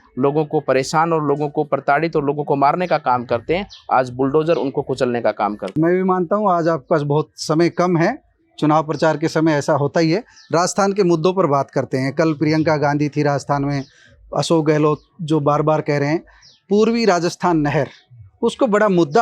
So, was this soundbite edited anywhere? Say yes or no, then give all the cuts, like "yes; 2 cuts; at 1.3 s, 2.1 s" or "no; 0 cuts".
no; 0 cuts